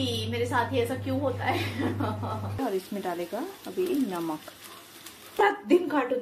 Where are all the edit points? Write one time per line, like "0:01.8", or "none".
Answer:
0:02.6
0:05.4